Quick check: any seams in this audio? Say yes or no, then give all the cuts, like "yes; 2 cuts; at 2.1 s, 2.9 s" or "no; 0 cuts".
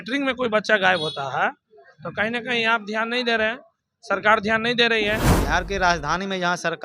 yes; 1 cut; at 5.3 s